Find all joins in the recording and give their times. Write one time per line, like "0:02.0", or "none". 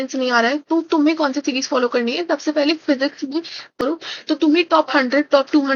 0:03.7